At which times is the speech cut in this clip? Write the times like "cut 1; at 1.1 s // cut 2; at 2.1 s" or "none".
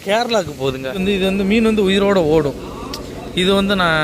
cut 1; at 1.0 s